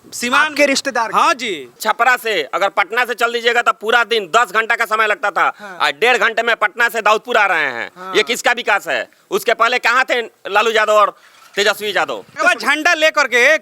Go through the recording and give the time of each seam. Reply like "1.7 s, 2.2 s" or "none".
1.7 s, 12.4 s